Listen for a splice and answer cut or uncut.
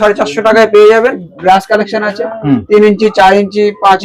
cut